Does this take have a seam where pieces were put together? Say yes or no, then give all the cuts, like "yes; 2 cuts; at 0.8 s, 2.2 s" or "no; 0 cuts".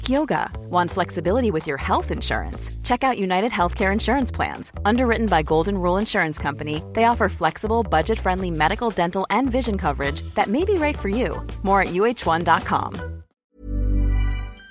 yes; 1 cut; at 13.4 s